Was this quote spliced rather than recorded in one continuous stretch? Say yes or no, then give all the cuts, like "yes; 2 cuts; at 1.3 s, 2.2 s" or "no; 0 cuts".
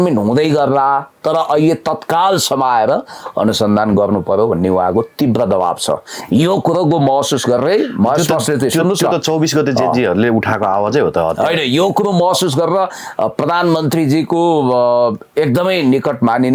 no; 0 cuts